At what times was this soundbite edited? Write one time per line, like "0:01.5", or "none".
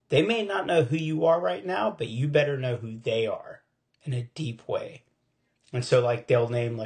none